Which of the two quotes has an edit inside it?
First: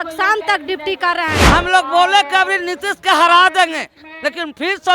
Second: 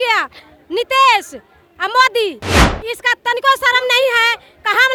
first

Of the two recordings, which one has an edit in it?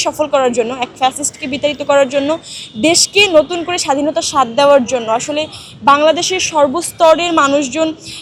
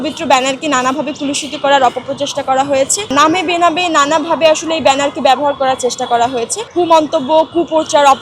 second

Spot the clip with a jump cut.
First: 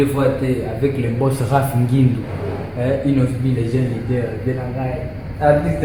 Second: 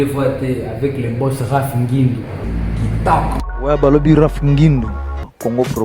second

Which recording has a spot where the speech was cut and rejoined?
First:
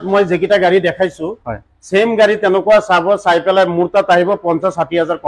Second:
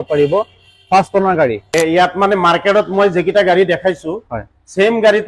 second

